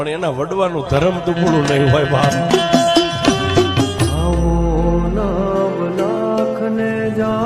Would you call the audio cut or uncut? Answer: uncut